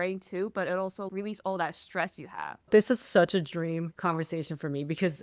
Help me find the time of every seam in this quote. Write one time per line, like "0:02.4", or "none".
0:01.1
0:02.6